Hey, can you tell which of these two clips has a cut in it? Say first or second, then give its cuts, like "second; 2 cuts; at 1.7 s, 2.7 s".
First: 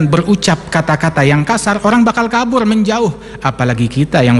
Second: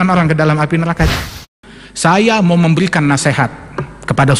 second; 1 cut; at 1.2 s